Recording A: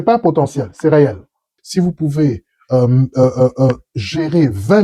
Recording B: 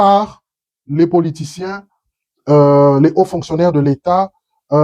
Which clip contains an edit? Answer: A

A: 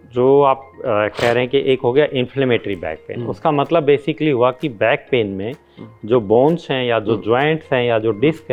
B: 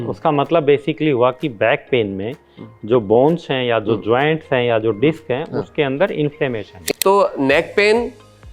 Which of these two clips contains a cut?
B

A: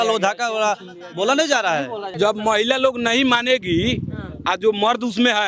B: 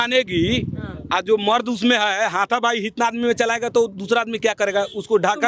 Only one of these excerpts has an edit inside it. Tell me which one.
A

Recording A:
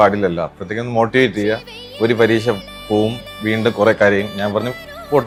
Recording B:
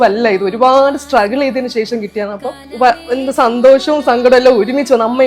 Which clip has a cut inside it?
B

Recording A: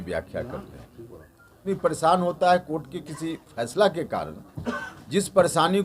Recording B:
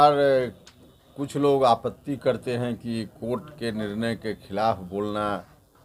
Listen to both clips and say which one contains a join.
A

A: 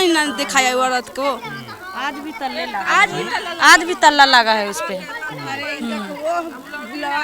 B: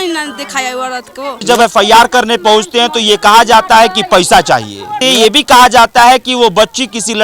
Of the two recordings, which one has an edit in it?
B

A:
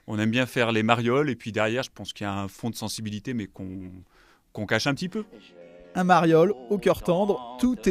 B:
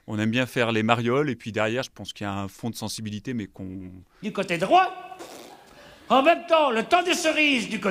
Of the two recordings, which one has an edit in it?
A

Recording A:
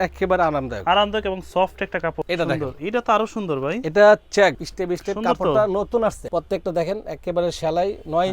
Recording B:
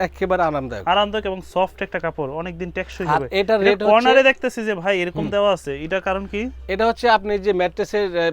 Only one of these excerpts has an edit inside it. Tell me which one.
A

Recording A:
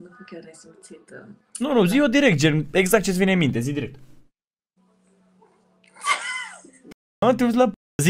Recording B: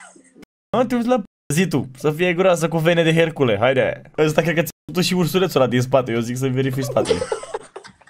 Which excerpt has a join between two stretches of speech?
B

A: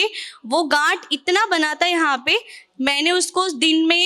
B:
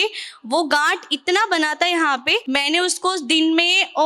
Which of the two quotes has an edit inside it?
B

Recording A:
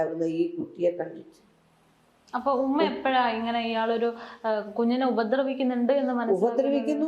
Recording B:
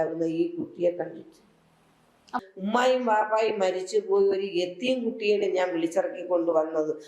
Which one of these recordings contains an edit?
B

